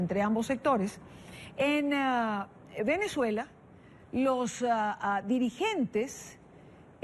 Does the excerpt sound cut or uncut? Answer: uncut